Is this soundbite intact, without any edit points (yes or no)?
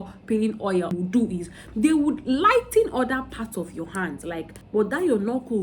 no